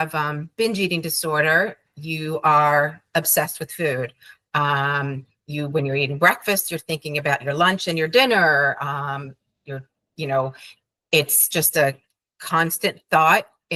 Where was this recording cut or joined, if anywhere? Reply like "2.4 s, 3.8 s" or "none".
none